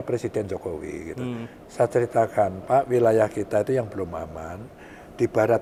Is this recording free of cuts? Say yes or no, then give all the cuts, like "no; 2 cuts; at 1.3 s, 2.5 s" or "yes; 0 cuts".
yes; 0 cuts